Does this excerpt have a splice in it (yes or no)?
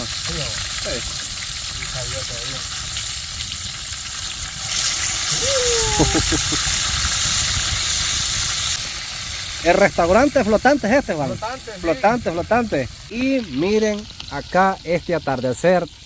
yes